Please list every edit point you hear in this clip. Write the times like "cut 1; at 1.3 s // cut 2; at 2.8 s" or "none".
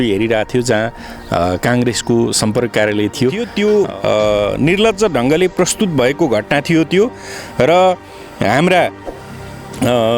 cut 1; at 3.4 s